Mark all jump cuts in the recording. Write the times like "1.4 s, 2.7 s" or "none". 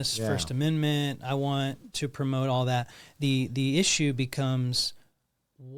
none